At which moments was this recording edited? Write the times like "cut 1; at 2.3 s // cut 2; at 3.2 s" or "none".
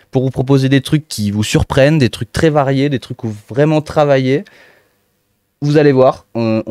none